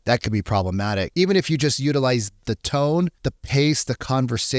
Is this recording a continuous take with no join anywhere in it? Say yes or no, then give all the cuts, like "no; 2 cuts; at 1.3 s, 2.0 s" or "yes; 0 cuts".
no; 3 cuts; at 1.1 s, 2.4 s, 3.2 s